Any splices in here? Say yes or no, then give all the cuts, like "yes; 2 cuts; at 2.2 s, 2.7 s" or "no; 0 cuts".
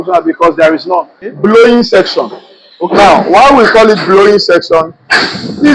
yes; 1 cut; at 1.3 s